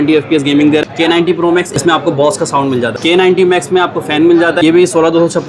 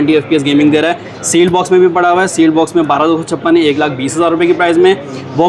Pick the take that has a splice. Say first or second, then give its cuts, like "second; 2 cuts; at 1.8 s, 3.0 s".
first; 3 cuts; at 1.3 s, 2.9 s, 4.6 s